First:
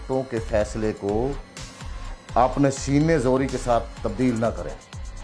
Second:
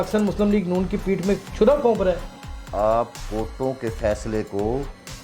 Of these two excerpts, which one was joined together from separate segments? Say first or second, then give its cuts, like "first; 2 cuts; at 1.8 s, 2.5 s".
second; 1 cut; at 2.3 s